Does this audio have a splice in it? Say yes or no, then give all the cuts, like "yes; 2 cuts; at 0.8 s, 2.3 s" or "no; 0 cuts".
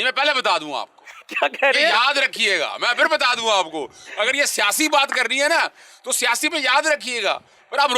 no; 0 cuts